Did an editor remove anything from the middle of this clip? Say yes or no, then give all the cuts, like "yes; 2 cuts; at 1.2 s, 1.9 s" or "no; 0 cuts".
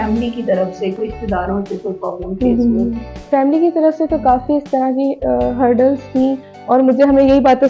yes; 3 cuts; at 1.0 s, 3.1 s, 6.5 s